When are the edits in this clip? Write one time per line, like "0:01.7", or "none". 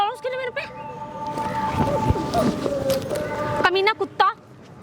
none